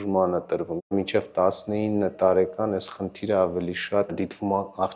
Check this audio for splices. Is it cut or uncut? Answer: cut